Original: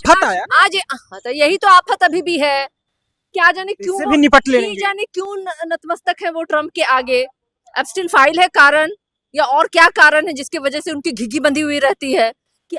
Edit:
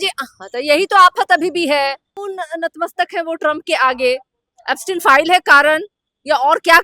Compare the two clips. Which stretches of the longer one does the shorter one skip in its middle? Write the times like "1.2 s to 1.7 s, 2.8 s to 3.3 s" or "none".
2.9 s to 5.3 s